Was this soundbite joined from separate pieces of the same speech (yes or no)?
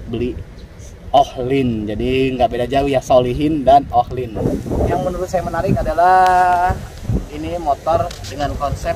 yes